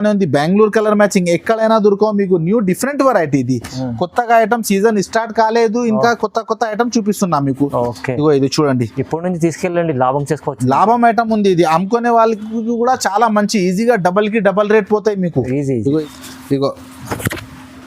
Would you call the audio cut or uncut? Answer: cut